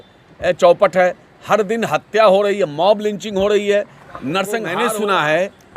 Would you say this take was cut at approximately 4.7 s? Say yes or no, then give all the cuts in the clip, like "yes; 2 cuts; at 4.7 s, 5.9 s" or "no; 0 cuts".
yes; 1 cut; at 4.7 s